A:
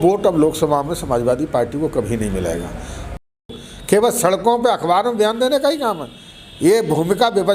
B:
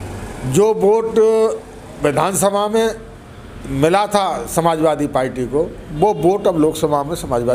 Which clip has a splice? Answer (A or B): A